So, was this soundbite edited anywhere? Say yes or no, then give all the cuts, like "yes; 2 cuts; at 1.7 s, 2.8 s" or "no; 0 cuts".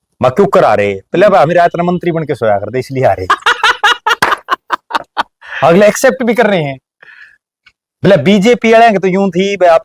no; 0 cuts